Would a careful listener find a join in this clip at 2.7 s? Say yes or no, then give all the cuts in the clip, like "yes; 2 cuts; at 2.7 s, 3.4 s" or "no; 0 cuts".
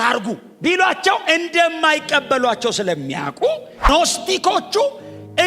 no; 1 cut; at 3.9 s